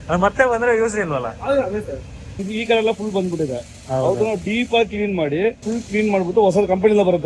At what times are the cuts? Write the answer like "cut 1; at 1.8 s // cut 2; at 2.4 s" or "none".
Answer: cut 1; at 2.4 s // cut 2; at 5.6 s